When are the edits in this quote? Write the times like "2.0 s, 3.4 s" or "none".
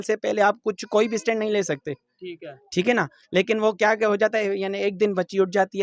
none